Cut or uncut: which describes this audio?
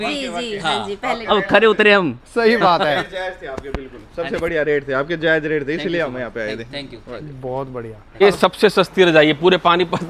cut